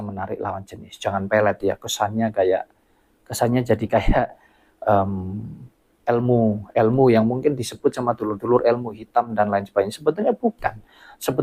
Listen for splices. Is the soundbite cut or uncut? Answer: uncut